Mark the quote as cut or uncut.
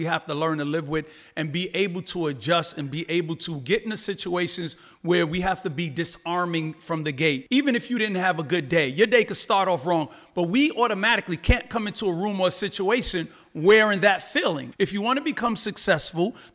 cut